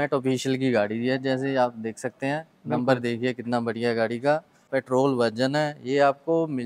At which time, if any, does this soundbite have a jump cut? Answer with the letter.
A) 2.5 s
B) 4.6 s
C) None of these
B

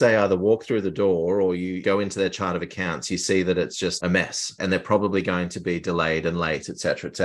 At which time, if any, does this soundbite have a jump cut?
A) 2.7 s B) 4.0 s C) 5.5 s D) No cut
B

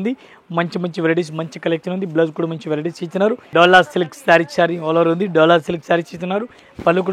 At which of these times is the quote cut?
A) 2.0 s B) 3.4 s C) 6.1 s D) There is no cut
B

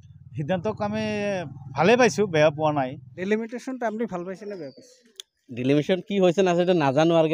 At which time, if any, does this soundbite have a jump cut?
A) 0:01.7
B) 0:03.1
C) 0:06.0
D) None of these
B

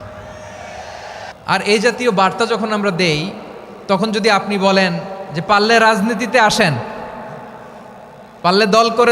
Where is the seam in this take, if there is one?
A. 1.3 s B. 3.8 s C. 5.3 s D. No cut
A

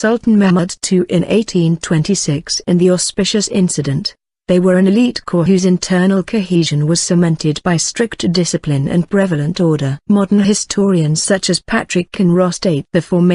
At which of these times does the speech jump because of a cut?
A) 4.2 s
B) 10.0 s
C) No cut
A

